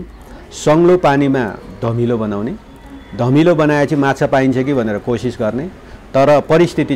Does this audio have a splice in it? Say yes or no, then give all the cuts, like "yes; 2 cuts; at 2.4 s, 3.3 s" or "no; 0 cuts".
no; 0 cuts